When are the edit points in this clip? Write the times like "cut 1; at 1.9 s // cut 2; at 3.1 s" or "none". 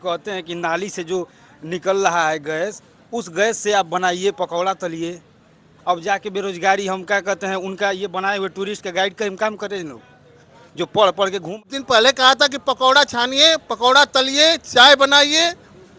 cut 1; at 11.5 s